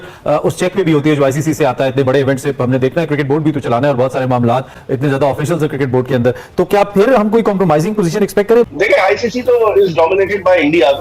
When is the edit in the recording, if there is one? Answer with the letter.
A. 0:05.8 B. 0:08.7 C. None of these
B